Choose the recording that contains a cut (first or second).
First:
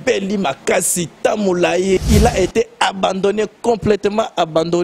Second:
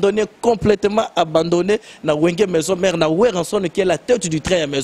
first